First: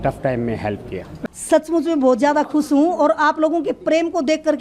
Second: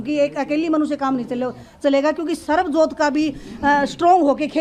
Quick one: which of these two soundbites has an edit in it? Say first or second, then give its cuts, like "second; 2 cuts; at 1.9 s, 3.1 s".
first; 1 cut; at 1.2 s